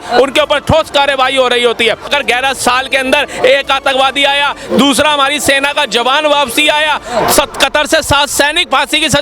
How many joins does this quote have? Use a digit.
1